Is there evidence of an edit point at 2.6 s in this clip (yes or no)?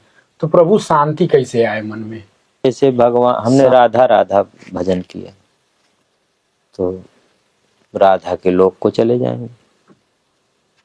yes